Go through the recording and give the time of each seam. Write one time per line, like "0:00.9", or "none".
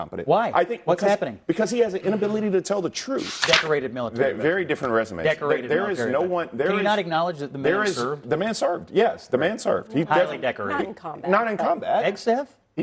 0:03.4